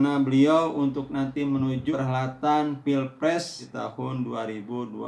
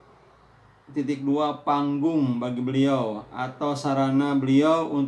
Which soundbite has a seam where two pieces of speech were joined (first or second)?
first